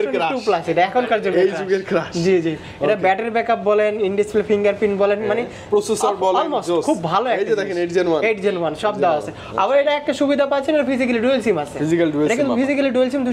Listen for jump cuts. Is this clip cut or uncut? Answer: uncut